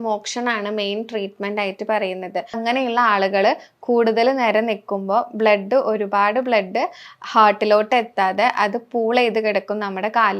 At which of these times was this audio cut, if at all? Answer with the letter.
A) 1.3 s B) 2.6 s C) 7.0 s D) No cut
B